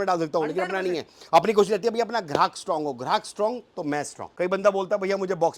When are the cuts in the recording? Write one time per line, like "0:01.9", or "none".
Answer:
0:04.2